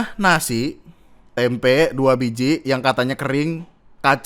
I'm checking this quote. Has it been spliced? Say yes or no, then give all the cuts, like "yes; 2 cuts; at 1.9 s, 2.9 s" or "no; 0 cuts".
yes; 1 cut; at 1.2 s